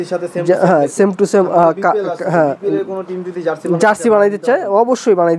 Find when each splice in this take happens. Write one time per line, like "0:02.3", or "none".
none